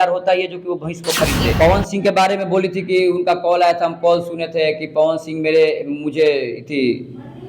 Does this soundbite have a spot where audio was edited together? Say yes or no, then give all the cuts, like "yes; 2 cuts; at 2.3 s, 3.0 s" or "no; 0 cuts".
yes; 1 cut; at 1.5 s